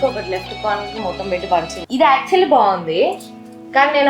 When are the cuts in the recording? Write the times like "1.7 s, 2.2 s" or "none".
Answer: none

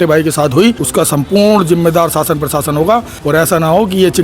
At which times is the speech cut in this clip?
0.8 s, 3.1 s

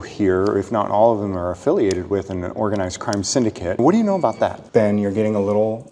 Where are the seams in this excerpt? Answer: 3.8 s, 4.6 s

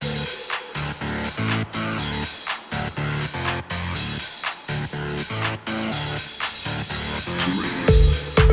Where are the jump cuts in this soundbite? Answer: none

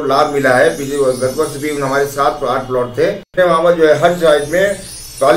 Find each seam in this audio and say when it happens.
3.3 s

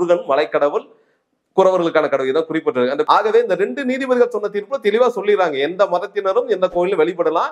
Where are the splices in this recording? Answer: 3.1 s

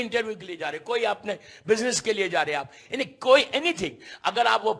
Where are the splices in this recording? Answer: none

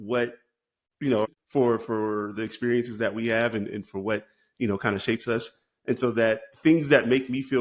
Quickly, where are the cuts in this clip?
1.1 s

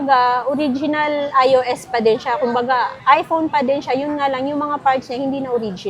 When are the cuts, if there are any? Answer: none

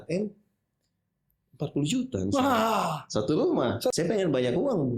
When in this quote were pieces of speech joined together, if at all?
3.9 s

